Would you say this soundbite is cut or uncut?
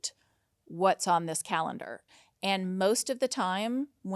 cut